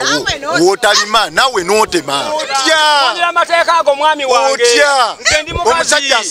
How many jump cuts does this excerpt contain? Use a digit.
1